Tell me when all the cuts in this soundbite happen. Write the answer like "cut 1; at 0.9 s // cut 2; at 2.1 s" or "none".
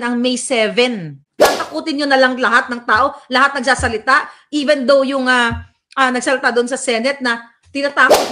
cut 1; at 1.2 s